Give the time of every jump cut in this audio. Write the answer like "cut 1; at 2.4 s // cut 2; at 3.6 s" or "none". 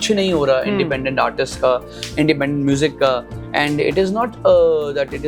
none